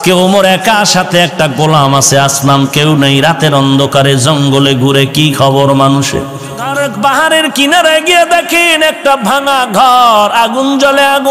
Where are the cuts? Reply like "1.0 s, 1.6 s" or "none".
6.7 s